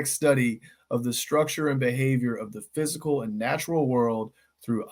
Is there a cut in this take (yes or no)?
no